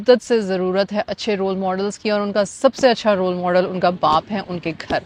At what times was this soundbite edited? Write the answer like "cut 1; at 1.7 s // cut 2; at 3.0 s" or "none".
none